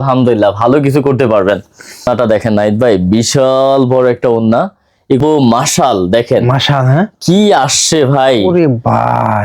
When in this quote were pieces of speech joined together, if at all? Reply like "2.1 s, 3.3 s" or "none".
2.1 s, 5.2 s